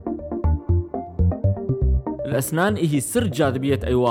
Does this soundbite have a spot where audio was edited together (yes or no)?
yes